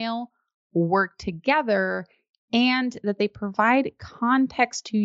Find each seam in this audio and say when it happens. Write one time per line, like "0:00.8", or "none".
none

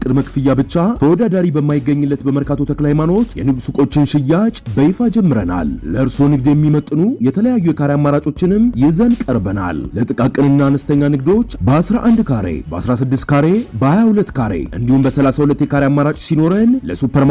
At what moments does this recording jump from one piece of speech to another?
none

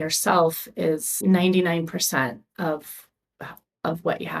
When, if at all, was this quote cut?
0:01.2

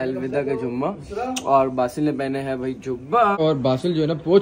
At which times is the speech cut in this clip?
0:03.4

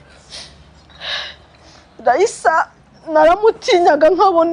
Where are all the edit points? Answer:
none

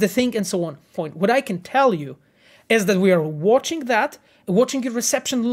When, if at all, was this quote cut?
0:01.0

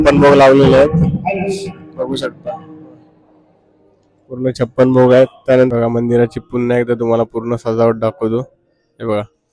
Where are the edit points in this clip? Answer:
0:05.7

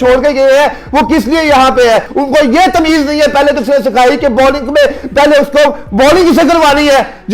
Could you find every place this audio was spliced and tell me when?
0:02.1

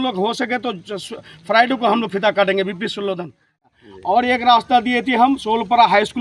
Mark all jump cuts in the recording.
0:03.7

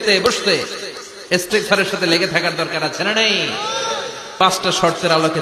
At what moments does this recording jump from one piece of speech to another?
0:04.3

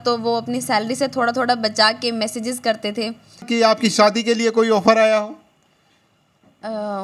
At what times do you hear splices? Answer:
0:03.4

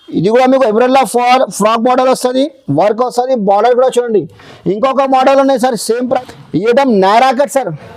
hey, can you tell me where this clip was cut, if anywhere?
0:06.2

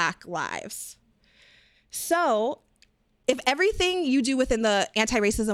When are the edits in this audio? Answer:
0:03.1

